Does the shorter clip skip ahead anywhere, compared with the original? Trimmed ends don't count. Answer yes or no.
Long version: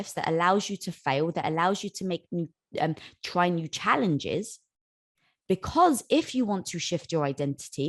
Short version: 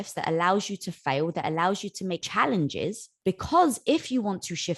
yes